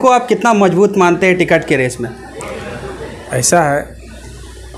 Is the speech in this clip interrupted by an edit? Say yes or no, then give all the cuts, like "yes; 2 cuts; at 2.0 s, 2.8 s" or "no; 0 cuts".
no; 0 cuts